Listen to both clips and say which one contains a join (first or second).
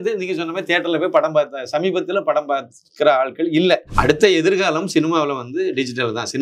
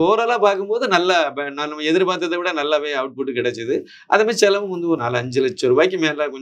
first